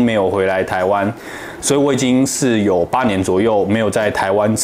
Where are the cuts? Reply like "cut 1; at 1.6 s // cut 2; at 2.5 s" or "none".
none